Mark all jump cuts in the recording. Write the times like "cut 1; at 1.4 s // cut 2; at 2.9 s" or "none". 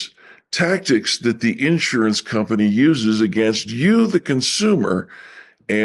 none